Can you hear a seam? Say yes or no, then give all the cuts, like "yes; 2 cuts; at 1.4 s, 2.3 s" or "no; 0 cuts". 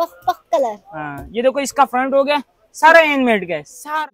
no; 0 cuts